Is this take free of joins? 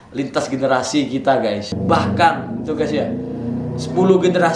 no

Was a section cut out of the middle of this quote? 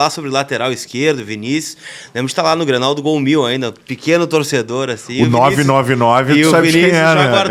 no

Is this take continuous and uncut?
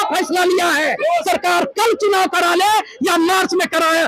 no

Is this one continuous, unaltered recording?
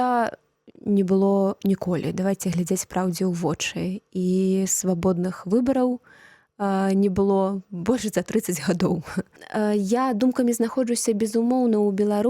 no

